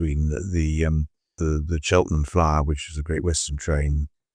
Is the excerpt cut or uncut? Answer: cut